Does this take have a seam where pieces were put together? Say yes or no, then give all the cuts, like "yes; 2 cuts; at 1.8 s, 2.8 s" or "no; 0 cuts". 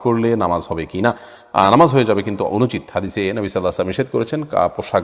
no; 0 cuts